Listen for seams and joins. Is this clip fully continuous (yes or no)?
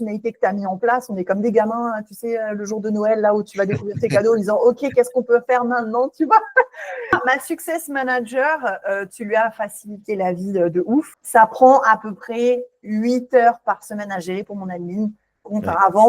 no